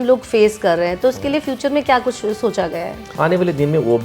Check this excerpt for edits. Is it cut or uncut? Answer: cut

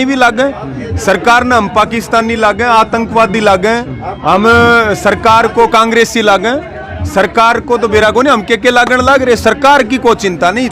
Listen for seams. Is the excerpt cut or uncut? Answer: uncut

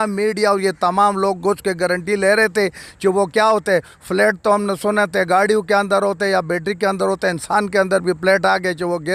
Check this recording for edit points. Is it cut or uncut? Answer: uncut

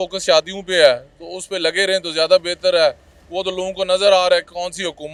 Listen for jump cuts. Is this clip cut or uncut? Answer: uncut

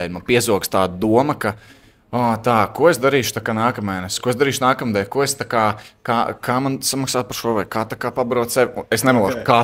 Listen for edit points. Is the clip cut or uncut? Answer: uncut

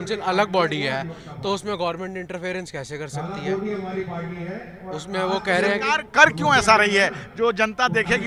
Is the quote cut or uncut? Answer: uncut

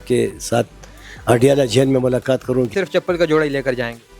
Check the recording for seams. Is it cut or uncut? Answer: cut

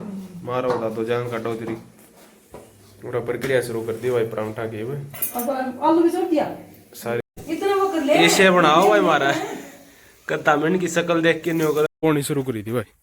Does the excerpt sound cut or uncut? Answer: cut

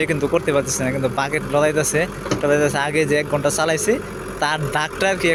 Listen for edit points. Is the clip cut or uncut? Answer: uncut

